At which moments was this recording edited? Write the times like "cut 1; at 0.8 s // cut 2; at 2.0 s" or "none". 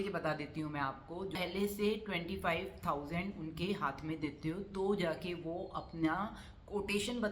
cut 1; at 1.4 s